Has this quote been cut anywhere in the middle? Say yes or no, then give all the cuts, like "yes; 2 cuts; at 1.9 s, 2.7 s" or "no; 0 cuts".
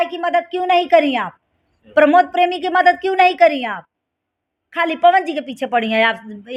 no; 0 cuts